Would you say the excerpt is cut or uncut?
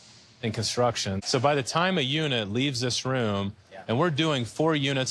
cut